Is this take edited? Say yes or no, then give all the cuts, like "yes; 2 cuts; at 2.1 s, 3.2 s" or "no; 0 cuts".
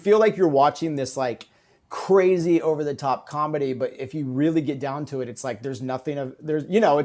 no; 0 cuts